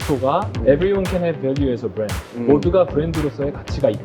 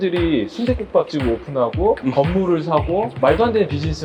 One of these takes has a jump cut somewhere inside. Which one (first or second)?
second